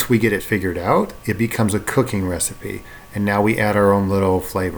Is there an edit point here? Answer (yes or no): no